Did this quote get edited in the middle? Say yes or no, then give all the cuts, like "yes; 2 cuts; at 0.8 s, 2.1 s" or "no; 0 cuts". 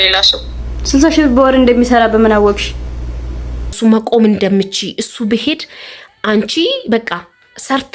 yes; 1 cut; at 3.8 s